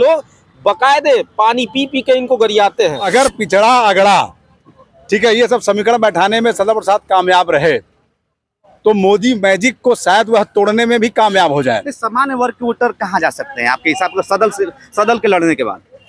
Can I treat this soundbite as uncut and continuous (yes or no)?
no